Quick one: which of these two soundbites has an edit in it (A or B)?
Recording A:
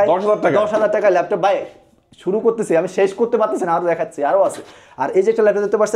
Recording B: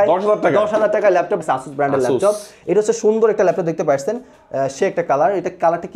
B